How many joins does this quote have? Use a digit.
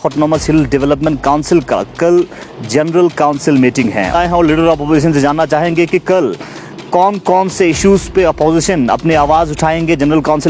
1